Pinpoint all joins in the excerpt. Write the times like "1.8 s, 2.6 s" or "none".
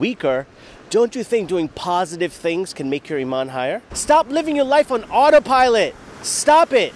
3.9 s